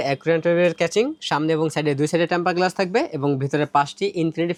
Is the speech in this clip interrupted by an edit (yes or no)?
no